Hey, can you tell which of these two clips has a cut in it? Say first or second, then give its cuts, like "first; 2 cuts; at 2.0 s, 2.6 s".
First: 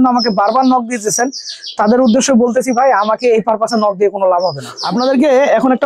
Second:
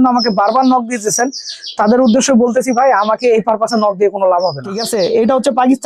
second; 1 cut; at 4.8 s